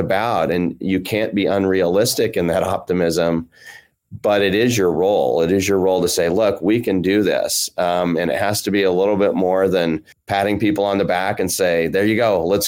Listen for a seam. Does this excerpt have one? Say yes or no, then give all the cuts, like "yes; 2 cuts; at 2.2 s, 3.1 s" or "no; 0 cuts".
yes; 1 cut; at 10.1 s